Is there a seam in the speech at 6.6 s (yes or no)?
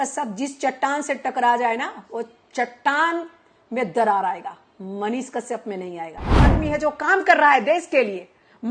yes